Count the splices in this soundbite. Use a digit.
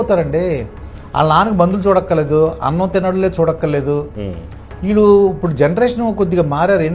0